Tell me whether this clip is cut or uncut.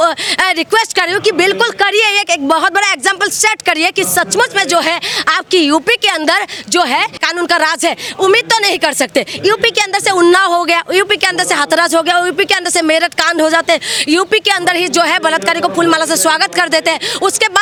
uncut